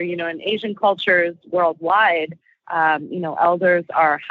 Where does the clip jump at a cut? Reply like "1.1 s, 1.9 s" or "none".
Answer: none